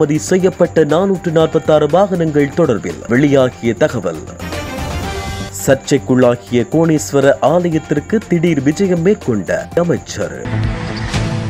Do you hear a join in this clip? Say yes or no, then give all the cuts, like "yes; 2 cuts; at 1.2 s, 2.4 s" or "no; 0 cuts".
yes; 1 cut; at 10.4 s